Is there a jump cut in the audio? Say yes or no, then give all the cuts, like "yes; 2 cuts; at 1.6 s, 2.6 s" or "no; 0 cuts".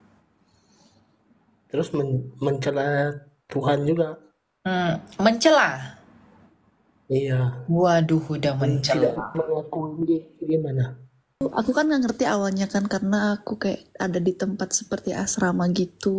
yes; 1 cut; at 11.4 s